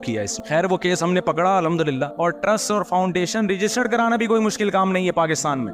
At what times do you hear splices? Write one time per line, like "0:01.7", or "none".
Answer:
0:02.1